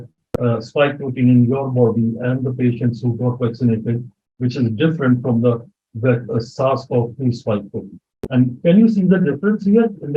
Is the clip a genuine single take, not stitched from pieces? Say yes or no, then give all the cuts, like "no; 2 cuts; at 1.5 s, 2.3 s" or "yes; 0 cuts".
yes; 0 cuts